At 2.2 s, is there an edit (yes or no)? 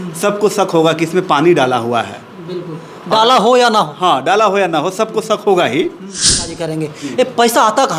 no